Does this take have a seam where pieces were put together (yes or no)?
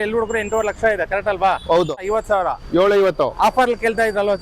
yes